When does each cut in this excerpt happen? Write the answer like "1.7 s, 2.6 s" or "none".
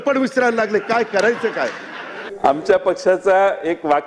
2.2 s